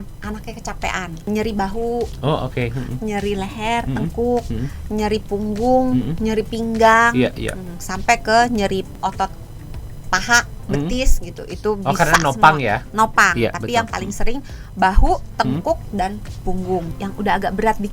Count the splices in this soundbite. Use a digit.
3